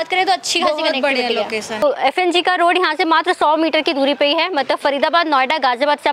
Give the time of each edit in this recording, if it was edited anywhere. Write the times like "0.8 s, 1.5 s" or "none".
1.8 s